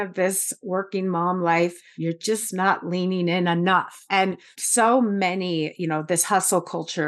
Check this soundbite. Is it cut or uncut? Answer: cut